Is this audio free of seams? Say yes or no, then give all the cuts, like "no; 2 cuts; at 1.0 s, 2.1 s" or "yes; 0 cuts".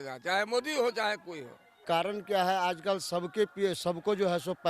no; 1 cut; at 1.8 s